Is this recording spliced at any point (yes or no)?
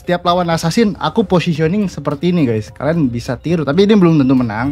no